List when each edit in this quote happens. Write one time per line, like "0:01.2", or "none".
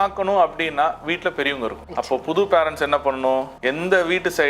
0:01.8
0:03.5